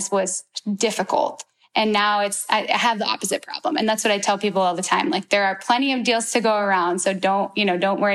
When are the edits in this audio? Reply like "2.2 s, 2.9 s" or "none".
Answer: none